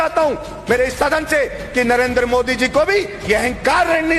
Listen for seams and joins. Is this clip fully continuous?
yes; 0 cuts

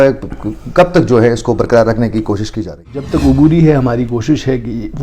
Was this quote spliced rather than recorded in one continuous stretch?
yes; 1 cut; at 3.0 s

